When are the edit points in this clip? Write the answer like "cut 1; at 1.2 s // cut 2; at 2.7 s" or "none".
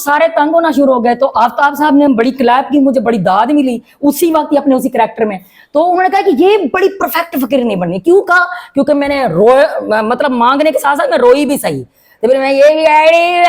none